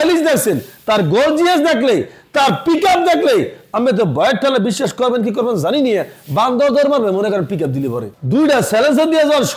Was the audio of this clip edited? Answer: yes; 1 cut; at 8.1 s

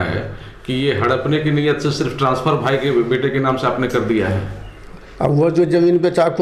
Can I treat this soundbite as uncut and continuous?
yes; 0 cuts

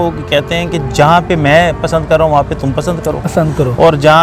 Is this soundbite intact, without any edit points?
yes; 0 cuts

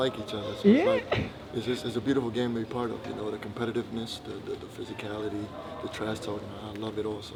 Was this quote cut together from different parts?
no; 0 cuts

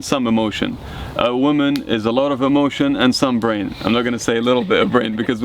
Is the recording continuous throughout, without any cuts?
yes; 0 cuts

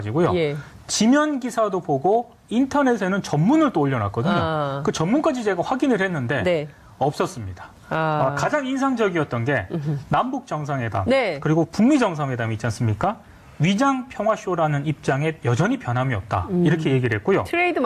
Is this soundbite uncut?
yes; 0 cuts

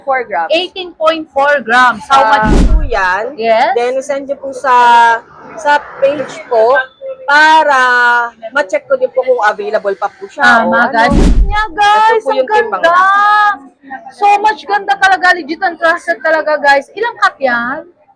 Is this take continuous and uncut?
no; 2 cuts; at 2.5 s, 11.2 s

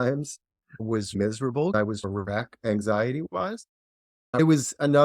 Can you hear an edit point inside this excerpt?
yes; 2 cuts; at 1.7 s, 4.4 s

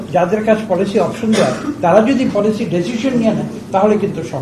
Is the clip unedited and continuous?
yes; 0 cuts

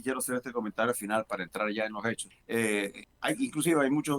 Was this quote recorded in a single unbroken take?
no; 2 cuts; at 2.3 s, 3.1 s

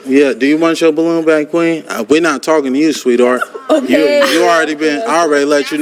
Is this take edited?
no; 0 cuts

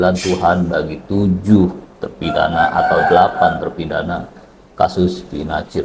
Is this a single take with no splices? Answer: yes; 0 cuts

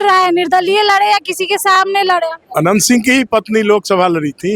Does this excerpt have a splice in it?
yes; 1 cut; at 2.4 s

